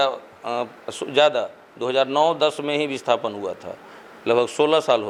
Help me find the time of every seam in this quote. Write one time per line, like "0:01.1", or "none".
none